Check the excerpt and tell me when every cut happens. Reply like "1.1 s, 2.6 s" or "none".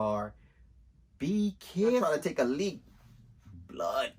2.0 s